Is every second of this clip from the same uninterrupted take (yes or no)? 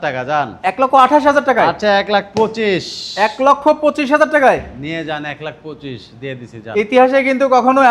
yes